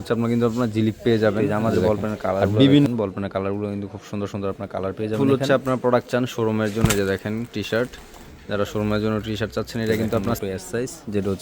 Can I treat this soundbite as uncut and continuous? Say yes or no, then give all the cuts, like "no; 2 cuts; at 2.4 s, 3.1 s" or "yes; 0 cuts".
no; 3 cuts; at 2.9 s, 5.4 s, 10.4 s